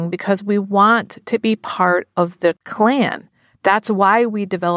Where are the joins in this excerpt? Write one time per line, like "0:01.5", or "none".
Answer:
0:02.7